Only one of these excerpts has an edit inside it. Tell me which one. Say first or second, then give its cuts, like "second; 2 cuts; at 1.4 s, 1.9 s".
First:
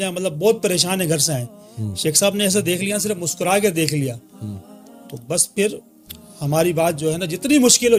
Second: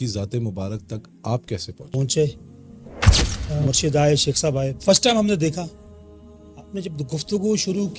second; 1 cut; at 1.9 s